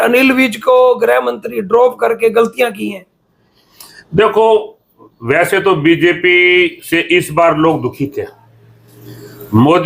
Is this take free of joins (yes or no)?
yes